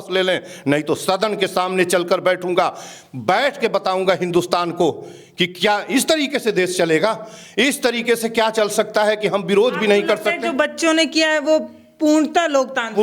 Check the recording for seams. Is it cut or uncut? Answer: uncut